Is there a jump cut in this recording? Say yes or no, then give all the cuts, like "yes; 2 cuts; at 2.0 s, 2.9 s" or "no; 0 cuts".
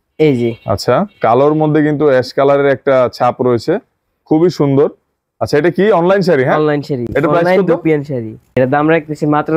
no; 0 cuts